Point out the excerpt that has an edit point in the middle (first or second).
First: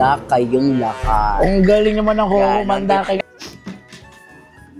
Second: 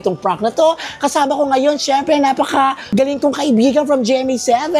first